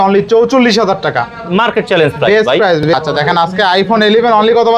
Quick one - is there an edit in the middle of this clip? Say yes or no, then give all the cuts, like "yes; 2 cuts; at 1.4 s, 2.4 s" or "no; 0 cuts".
yes; 1 cut; at 2.9 s